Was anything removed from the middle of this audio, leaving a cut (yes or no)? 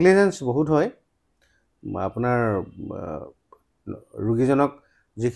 no